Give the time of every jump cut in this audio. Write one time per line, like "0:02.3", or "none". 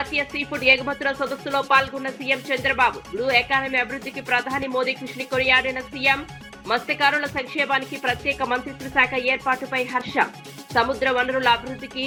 none